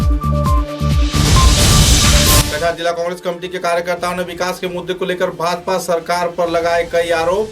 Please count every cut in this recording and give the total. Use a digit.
1